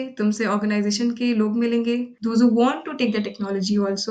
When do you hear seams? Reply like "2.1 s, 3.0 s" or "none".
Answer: 2.1 s